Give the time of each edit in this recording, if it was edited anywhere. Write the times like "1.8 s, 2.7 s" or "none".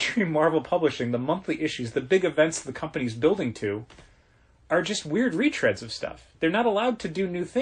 none

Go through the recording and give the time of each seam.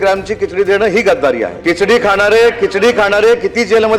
1.5 s

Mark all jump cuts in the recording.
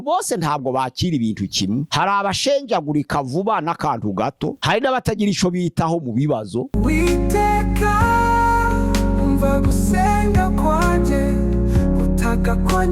6.7 s

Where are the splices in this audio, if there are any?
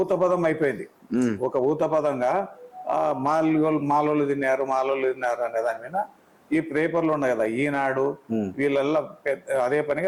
none

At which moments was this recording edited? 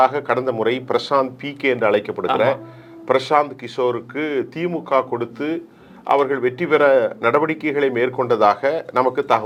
none

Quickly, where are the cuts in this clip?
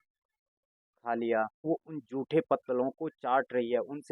1.7 s

